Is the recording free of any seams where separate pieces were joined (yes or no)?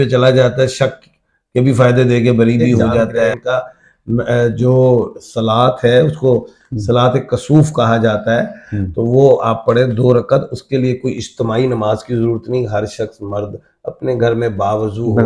no